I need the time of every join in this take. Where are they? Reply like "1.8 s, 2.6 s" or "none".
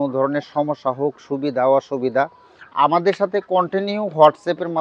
none